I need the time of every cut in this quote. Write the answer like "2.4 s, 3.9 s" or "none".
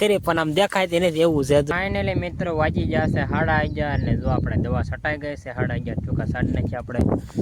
1.7 s